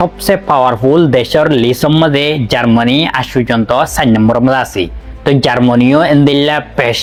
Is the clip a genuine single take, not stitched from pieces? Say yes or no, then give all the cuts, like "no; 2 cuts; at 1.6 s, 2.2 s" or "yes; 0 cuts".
yes; 0 cuts